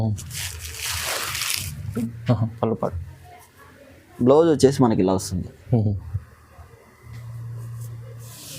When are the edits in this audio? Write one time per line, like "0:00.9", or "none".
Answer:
0:01.9